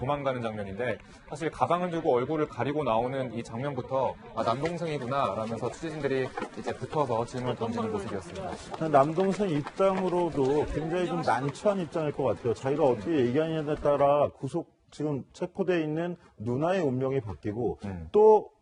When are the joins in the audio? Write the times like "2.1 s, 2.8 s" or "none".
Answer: none